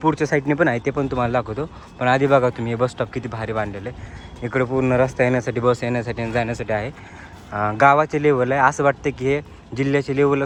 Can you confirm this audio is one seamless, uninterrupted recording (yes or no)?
yes